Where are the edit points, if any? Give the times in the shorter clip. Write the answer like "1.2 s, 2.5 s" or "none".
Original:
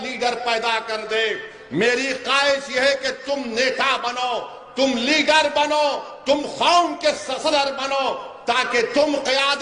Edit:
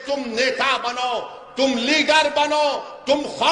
none